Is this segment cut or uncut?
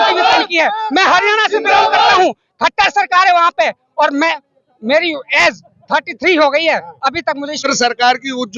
cut